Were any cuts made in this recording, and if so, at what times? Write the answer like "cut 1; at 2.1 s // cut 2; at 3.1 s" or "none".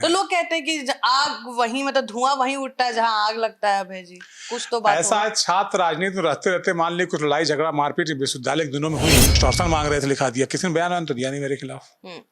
cut 1; at 9.3 s